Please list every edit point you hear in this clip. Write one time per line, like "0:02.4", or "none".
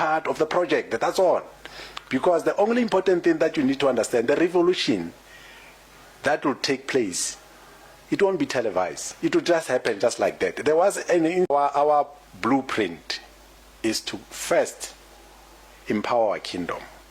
0:11.5

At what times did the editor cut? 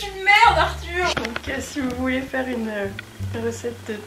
0:01.1

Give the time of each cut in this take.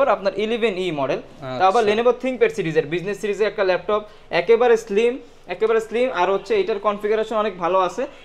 none

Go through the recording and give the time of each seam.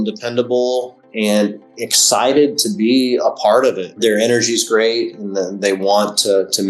0:03.9

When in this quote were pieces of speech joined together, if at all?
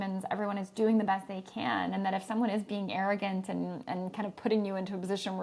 none

